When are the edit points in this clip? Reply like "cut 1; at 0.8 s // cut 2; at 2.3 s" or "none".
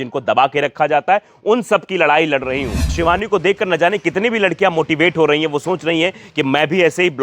cut 1; at 2.9 s